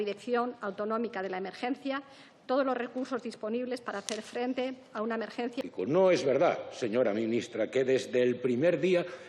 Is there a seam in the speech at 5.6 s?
yes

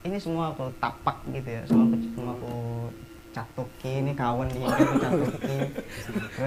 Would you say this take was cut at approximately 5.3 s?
no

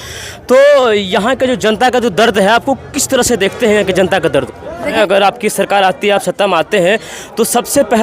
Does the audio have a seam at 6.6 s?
no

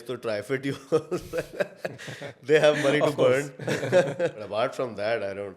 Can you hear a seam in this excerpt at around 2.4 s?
no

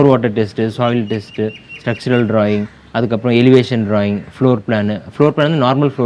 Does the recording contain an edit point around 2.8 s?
no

